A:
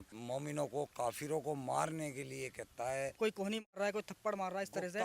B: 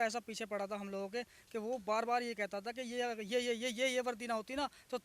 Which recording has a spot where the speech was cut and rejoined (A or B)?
A